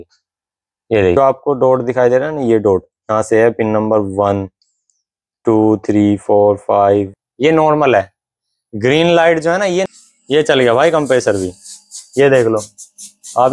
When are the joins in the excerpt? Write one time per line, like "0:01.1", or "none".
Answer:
0:01.2
0:07.2
0:09.9